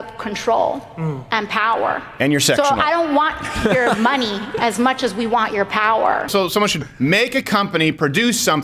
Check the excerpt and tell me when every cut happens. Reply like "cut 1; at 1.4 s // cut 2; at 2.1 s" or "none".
cut 1; at 6.3 s

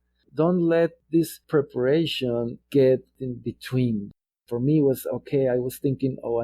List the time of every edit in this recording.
cut 1; at 1.0 s // cut 2; at 4.2 s

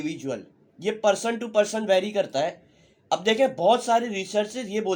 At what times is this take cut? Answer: none

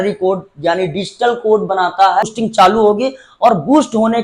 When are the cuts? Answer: cut 1; at 2.3 s

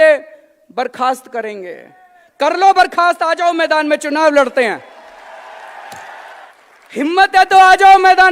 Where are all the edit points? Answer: cut 1; at 6.5 s

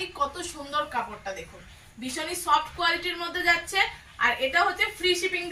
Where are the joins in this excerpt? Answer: none

